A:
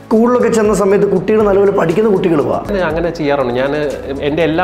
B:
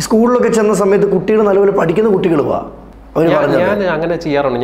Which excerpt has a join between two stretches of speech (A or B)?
A